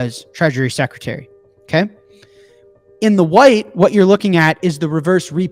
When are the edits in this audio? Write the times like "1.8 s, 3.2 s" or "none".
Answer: none